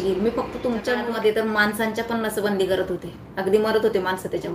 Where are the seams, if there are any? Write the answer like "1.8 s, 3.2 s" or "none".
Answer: 1.0 s